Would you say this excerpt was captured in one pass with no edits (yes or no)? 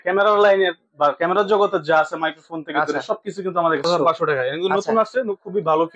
no